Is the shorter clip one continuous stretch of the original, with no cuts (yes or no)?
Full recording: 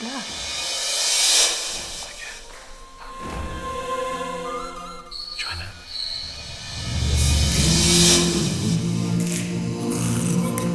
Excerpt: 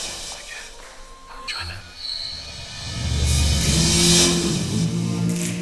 no